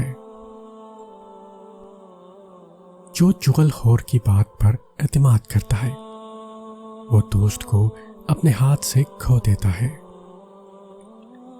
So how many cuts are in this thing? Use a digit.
1